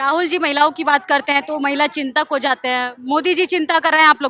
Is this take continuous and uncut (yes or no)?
yes